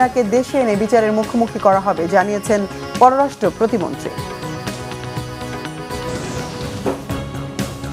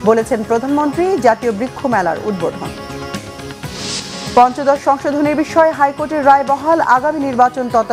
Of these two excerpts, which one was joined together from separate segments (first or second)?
first